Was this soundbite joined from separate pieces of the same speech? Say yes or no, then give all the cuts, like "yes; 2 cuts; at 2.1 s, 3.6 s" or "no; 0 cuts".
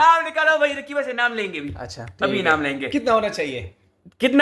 no; 0 cuts